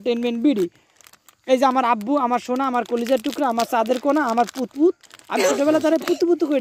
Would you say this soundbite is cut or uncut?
uncut